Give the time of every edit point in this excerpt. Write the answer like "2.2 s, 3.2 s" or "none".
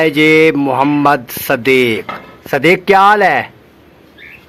none